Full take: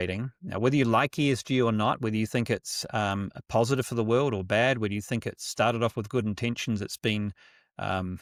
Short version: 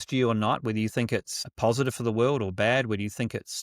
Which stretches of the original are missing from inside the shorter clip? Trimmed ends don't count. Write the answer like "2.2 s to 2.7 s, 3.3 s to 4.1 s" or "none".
2.8 s to 3.3 s